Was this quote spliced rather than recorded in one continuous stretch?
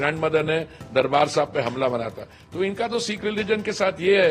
no; 0 cuts

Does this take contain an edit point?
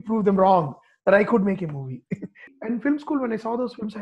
yes; 1 cut; at 2.5 s

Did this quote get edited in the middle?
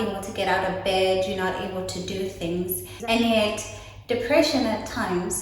yes; 1 cut; at 2.9 s

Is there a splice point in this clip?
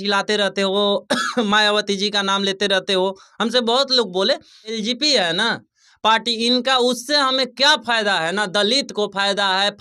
yes; 1 cut; at 4.8 s

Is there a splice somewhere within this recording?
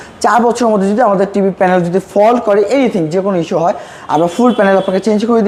no; 0 cuts

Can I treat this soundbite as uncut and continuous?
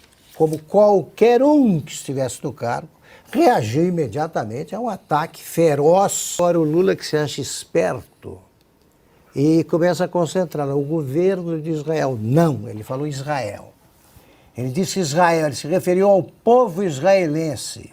no; 1 cut; at 6.4 s

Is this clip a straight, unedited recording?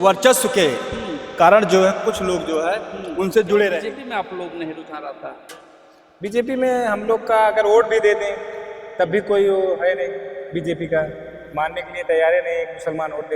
no; 1 cut; at 3.8 s

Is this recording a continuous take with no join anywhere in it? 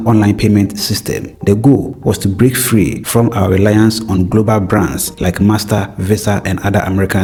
yes; 0 cuts

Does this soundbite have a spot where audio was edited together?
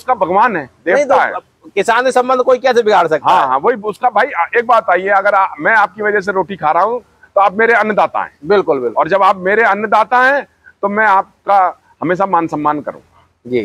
no; 0 cuts

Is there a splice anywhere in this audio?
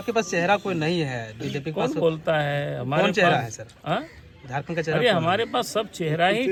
no; 0 cuts

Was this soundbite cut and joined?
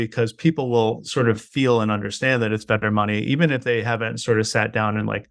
no; 0 cuts

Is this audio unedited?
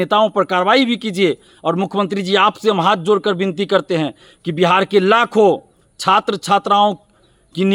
yes; 0 cuts

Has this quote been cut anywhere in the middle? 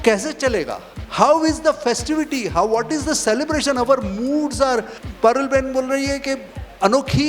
no; 0 cuts

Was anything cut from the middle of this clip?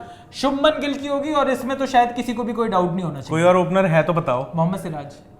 no; 0 cuts

